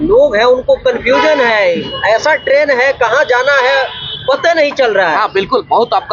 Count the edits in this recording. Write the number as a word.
zero